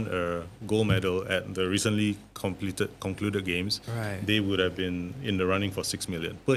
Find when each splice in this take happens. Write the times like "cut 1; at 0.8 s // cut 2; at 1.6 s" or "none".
none